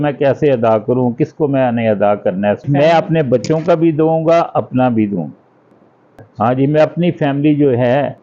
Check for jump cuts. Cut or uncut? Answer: uncut